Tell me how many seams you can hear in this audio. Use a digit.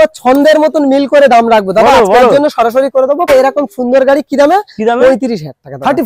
1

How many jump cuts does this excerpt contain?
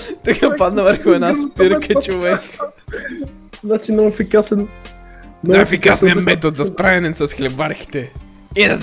1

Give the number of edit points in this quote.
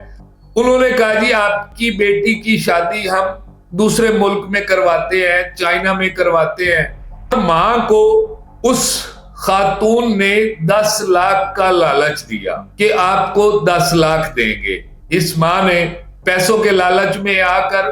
1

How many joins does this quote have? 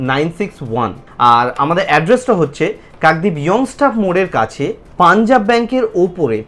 2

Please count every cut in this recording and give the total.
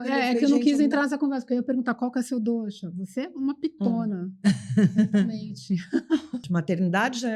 1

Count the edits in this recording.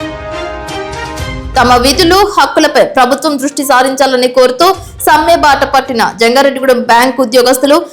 1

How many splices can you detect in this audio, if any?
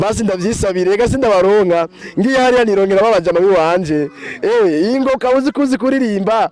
0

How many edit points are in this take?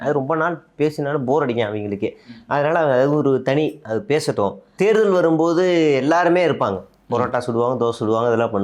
1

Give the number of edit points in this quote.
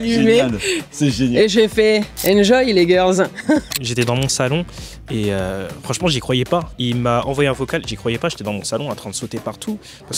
3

